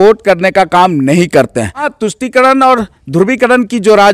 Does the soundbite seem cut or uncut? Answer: cut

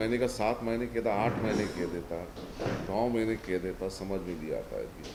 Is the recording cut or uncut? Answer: uncut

